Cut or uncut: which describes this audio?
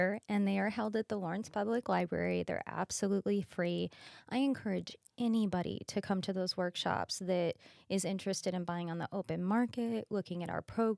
uncut